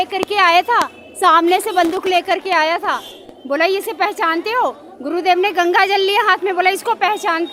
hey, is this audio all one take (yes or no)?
yes